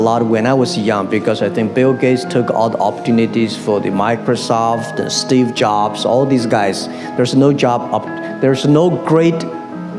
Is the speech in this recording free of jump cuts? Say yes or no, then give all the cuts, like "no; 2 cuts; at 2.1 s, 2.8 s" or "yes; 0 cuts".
yes; 0 cuts